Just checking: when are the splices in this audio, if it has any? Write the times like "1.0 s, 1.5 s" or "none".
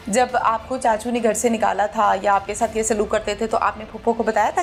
none